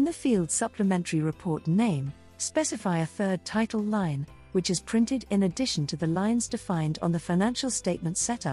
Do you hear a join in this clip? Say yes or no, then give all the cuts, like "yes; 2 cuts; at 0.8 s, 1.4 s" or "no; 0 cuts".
no; 0 cuts